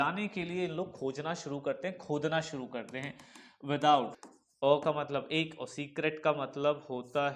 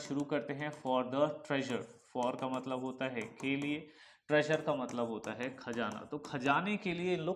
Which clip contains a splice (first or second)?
first